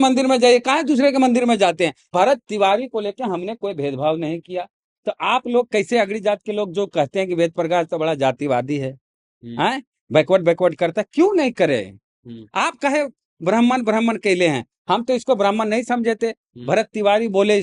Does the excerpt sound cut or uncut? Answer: cut